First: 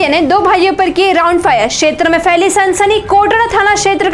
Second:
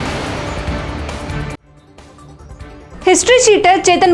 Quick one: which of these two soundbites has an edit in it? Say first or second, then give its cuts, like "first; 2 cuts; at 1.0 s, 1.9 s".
second; 1 cut; at 2.8 s